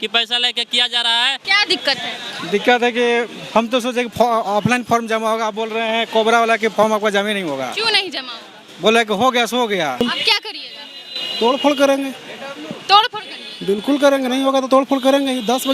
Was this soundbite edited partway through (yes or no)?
yes